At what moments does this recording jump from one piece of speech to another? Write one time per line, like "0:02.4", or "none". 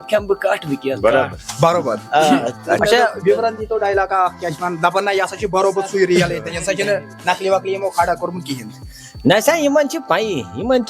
0:02.8